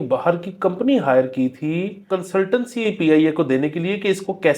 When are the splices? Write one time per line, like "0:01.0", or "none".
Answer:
0:02.0